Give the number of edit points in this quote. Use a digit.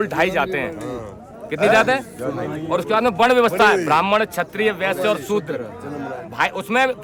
0